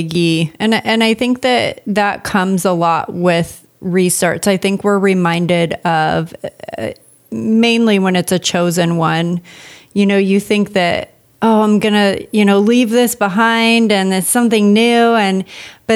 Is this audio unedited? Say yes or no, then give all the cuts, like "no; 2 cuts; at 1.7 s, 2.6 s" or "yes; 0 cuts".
no; 1 cut; at 0.9 s